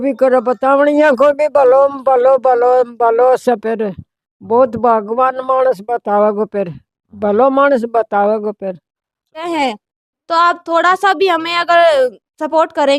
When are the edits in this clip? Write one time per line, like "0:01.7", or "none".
0:09.4